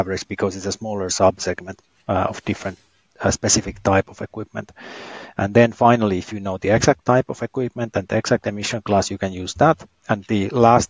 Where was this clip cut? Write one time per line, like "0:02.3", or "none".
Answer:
0:09.9